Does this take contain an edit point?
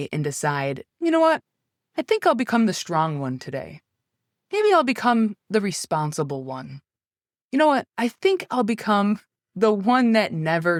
no; 0 cuts

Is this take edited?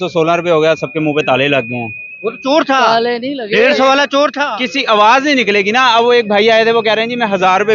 no; 0 cuts

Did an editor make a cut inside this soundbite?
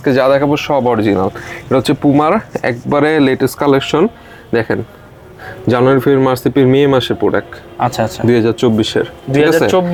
no; 0 cuts

